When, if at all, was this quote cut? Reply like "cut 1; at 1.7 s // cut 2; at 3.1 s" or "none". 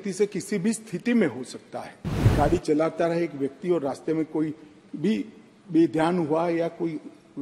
cut 1; at 2.3 s